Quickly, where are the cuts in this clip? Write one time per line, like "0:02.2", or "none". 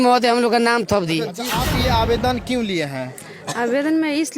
0:01.6